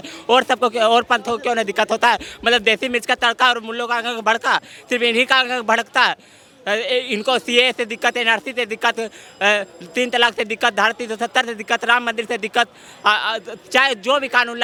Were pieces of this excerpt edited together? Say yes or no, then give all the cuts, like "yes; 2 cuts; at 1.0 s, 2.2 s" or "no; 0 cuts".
no; 0 cuts